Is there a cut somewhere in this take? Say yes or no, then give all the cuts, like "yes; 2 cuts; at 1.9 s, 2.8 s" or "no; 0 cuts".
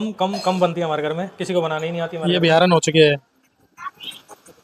yes; 1 cut; at 2.2 s